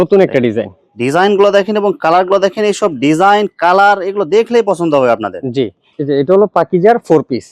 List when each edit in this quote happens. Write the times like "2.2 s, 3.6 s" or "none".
5.8 s